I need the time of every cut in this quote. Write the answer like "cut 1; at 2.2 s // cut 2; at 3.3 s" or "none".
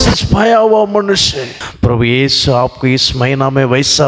cut 1; at 1.6 s